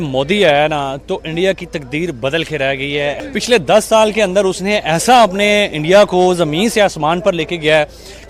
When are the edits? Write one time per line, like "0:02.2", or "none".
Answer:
0:03.2